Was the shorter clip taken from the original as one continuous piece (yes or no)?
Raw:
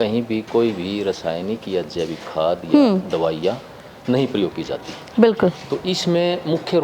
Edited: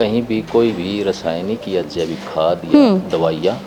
yes